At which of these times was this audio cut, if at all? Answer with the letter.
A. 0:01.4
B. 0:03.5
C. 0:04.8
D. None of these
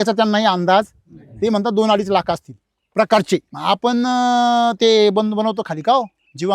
B